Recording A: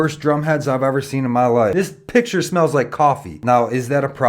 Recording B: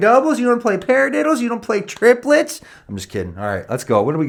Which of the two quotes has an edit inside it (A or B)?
A